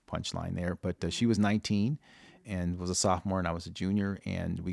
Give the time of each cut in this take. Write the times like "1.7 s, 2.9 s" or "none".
2.4 s